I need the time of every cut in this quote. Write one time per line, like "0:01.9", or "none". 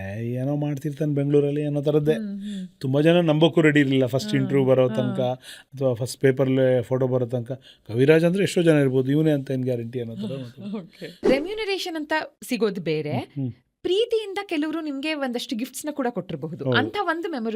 0:11.2